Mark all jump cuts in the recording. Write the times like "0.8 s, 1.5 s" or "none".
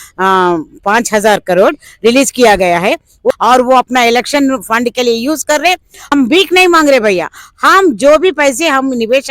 3.3 s, 6.1 s